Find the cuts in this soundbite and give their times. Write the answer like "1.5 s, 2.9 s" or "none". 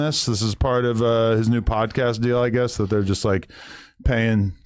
1.8 s